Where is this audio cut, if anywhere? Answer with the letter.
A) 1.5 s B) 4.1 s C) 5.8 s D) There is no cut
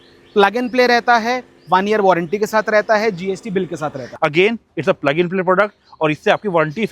B